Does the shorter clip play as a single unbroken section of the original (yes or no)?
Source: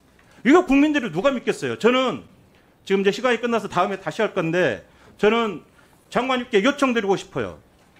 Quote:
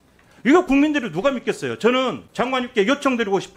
no